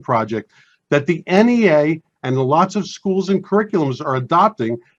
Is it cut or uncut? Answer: uncut